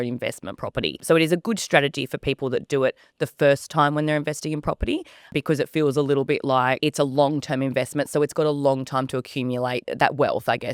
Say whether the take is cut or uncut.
cut